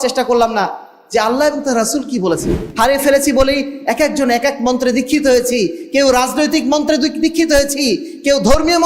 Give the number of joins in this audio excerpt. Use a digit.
1